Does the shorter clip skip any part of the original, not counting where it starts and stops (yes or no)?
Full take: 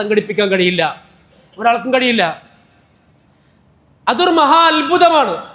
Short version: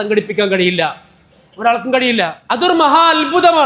yes